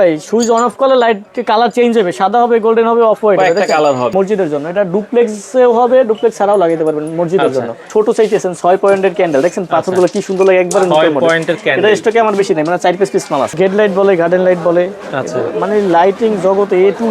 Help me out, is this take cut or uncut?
cut